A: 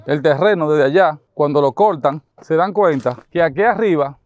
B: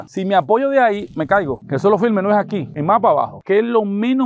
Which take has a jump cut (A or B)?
B